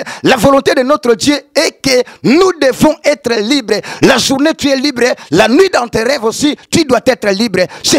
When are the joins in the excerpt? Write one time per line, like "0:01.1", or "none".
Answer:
none